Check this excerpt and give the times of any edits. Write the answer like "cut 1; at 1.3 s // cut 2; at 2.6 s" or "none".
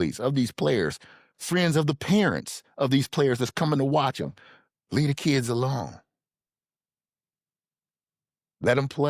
none